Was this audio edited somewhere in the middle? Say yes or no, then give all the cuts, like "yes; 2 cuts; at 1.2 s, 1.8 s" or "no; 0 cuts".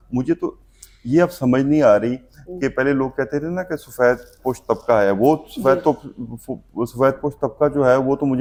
no; 0 cuts